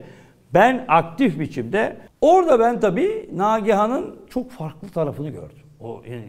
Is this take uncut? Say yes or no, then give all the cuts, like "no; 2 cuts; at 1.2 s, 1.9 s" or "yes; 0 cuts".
no; 1 cut; at 2.0 s